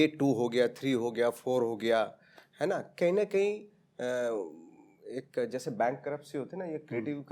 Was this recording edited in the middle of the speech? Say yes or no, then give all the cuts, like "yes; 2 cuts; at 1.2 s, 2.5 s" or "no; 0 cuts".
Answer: no; 0 cuts